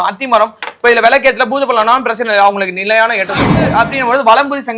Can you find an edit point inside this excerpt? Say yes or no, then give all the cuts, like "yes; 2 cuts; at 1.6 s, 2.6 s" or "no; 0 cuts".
yes; 1 cut; at 3.6 s